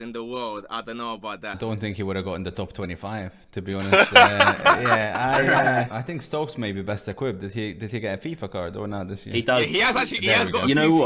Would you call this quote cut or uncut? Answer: cut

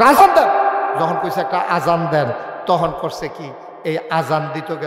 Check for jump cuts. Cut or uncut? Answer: uncut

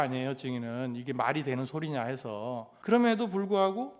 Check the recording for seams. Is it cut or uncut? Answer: cut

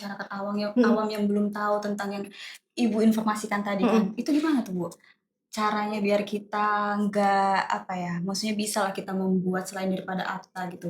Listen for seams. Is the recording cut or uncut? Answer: uncut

